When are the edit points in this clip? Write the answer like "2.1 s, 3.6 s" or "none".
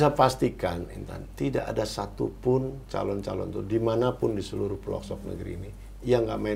none